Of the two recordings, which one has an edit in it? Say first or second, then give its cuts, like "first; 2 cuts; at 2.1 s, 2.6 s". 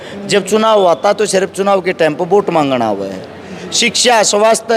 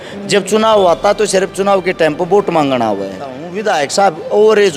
second; 1 cut; at 3.5 s